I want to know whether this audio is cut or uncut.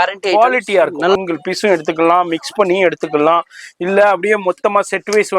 cut